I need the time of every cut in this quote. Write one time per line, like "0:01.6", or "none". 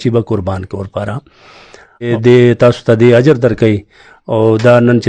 0:02.1